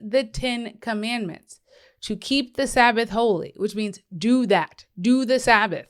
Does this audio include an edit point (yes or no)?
no